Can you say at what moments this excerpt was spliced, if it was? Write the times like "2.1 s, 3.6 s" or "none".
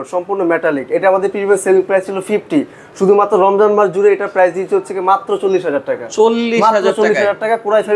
none